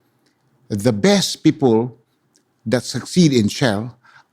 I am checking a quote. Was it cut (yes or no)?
no